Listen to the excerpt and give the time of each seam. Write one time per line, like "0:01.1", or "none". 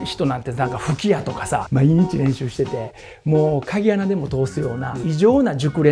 0:01.7
0:05.0